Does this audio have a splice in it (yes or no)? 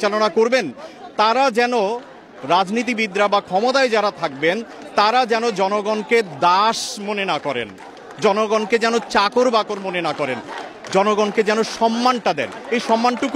no